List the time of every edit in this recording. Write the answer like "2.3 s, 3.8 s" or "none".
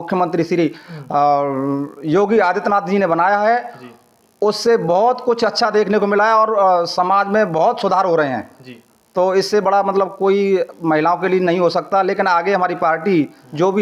none